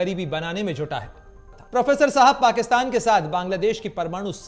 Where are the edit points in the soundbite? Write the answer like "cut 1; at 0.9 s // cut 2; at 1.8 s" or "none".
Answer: cut 1; at 1.9 s